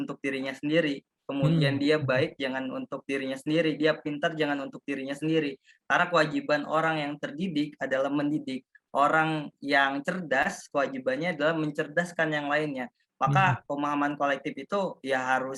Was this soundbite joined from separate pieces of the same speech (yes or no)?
no